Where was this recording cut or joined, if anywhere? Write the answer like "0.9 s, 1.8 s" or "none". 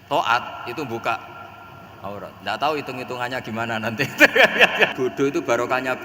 4.9 s